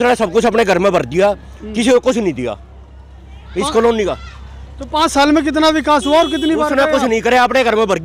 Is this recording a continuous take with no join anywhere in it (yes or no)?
yes